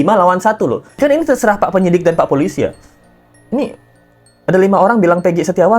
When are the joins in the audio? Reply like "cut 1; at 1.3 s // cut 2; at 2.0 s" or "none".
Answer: cut 1; at 1.0 s